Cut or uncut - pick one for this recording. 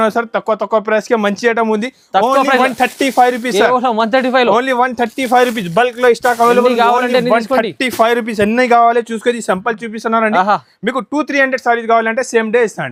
uncut